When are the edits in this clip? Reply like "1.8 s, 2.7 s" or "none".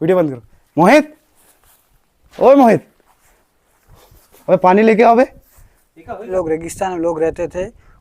6.2 s